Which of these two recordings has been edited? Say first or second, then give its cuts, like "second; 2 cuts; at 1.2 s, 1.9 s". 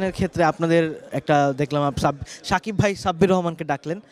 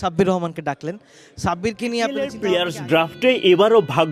second; 1 cut; at 2.3 s